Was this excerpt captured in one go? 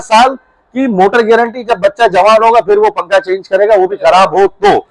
yes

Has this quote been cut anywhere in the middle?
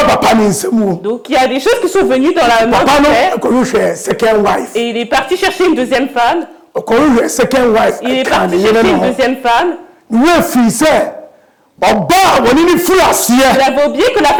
no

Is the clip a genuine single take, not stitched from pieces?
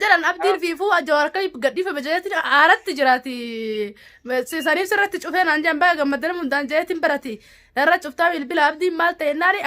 yes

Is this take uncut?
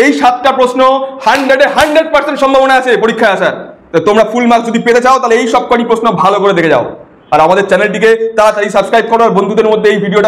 yes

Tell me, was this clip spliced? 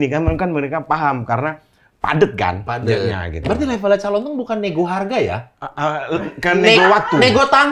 no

